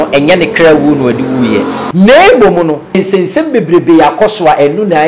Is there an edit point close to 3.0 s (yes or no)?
yes